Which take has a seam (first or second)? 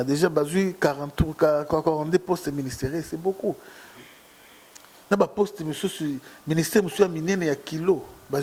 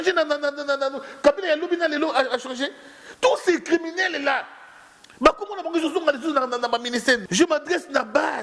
second